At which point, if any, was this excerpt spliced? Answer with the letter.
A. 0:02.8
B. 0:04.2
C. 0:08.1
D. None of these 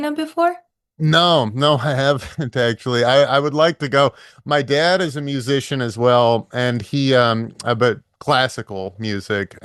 D